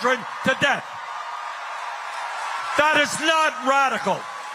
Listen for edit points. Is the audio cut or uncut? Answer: uncut